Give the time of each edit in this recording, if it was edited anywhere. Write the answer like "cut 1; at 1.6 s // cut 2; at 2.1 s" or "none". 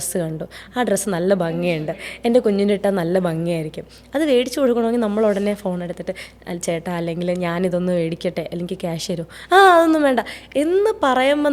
none